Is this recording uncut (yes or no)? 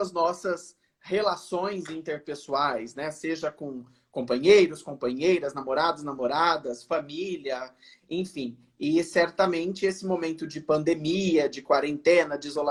yes